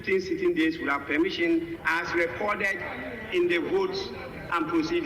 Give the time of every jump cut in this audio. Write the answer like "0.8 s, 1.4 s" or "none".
1.8 s

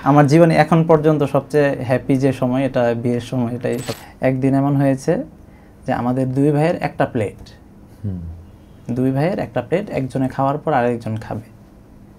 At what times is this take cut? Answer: 3.9 s

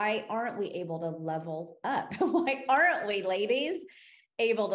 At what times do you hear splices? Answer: none

